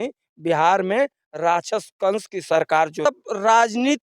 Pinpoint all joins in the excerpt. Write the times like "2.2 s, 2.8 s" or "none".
3.0 s